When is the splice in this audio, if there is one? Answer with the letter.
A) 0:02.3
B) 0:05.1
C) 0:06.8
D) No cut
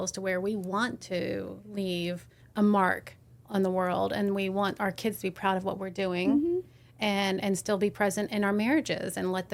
A